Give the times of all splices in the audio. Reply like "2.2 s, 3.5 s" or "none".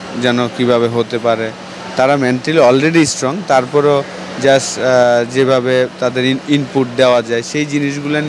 none